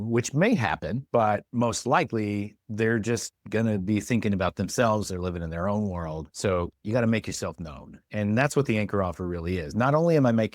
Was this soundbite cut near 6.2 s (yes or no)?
yes